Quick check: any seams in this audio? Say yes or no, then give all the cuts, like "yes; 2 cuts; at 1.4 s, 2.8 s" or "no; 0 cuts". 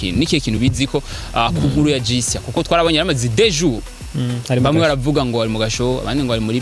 no; 0 cuts